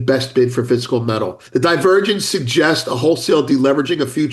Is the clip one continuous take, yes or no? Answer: no